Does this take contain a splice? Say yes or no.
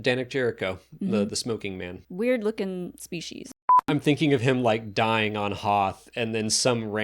yes